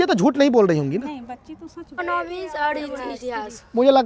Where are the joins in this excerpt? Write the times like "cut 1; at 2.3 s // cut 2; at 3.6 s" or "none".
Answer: cut 1; at 1.9 s